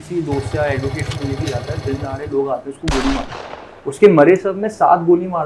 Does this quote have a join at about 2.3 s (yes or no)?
no